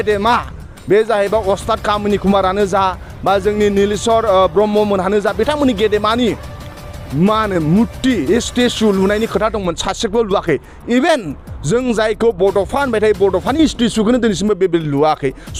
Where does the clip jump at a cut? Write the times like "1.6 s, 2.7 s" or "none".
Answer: none

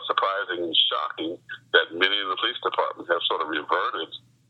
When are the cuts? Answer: none

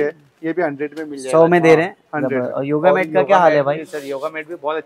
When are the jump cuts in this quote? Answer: none

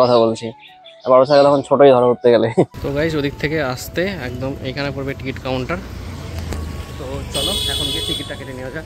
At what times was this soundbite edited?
2.8 s

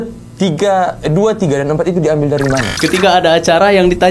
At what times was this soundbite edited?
2.7 s

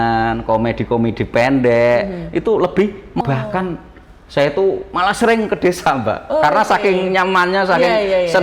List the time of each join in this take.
3.2 s

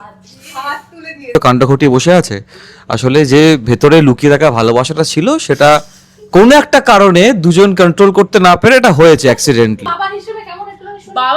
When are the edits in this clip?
1.3 s, 9.9 s

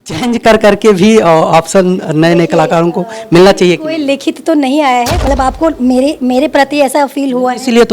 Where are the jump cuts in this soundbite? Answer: 5.3 s

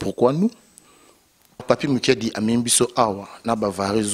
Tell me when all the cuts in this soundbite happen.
1.6 s

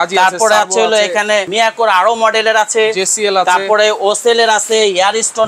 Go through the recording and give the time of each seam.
1.5 s

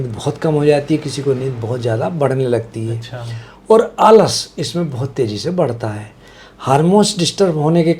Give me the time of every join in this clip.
none

